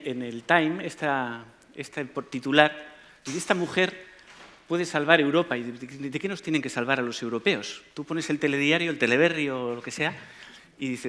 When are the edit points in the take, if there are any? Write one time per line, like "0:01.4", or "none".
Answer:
0:09.2